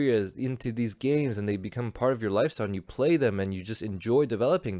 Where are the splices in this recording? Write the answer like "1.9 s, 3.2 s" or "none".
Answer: none